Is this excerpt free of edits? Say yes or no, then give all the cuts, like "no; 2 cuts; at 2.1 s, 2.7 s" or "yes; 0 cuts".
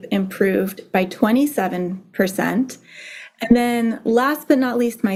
yes; 0 cuts